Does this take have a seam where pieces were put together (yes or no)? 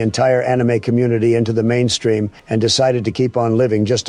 yes